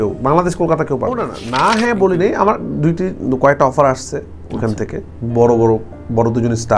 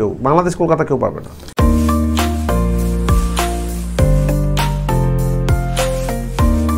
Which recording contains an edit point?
first; 1 cut; at 1.3 s

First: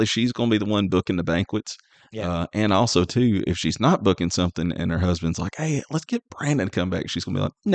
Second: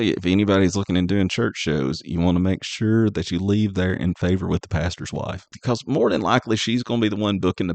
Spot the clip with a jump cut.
second; 1 cut; at 5.6 s

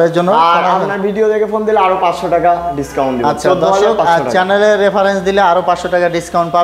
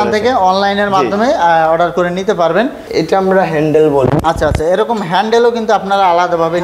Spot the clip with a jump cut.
second; 1 cut; at 2.8 s

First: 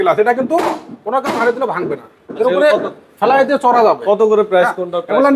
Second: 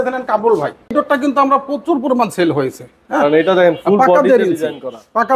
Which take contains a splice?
second; 1 cut; at 1.0 s

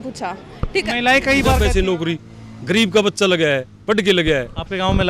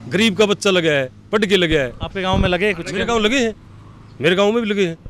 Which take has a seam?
first; 1 cut; at 1.6 s

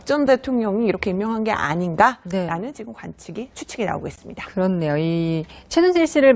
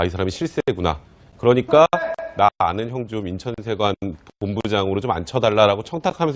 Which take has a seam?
first; 1 cut; at 2.4 s

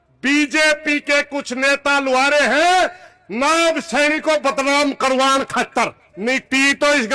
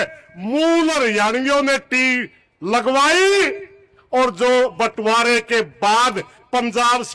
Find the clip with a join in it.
first; 1 cut; at 6.1 s

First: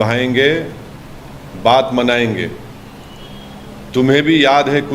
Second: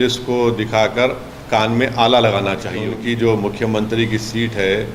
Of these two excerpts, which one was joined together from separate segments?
second; 1 cut; at 2.9 s

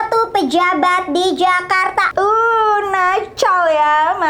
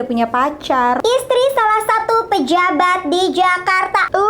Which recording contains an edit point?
second; 1 cut; at 1.0 s

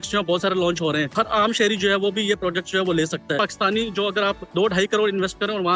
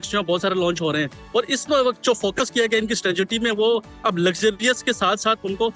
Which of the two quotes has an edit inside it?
first; 3 cuts; at 1.1 s, 3.4 s, 4.4 s

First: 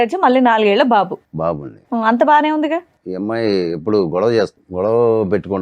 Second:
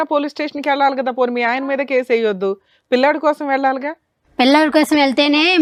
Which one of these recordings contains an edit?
first; 2 cuts; at 3.0 s, 4.6 s

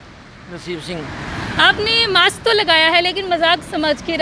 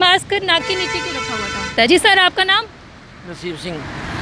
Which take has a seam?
second; 1 cut; at 1.9 s

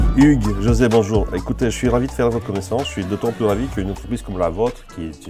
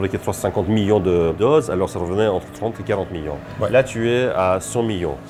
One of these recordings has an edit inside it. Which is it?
second; 1 cut; at 1.4 s

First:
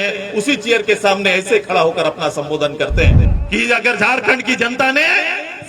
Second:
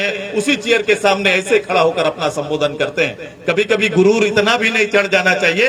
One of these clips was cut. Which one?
first; 1 cut; at 3.3 s

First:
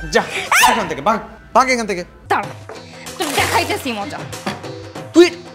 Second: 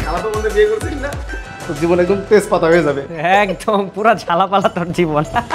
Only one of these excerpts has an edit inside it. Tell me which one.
first; 1 cut; at 2.1 s

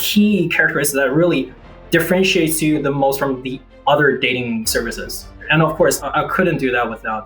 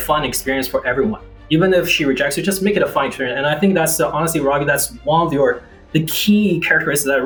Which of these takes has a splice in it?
first; 2 cuts; at 4.8 s, 6.0 s

